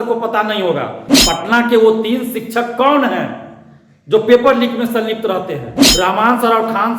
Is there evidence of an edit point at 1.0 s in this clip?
yes; 2 cuts; at 1.0 s, 5.8 s

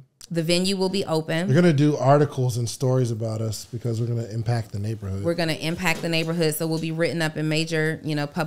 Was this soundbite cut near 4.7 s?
no; 0 cuts

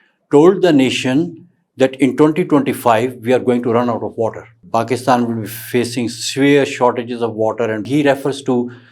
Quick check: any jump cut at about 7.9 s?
yes; 2 cuts; at 4.5 s, 7.9 s

